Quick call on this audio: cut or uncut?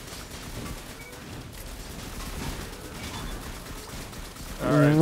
uncut